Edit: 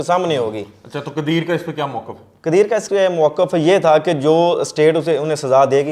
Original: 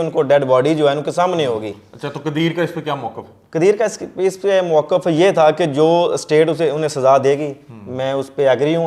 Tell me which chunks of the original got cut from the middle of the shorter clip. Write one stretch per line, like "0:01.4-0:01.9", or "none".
0:03.9-0:04.4